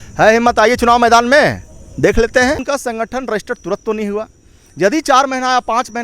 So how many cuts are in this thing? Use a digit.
1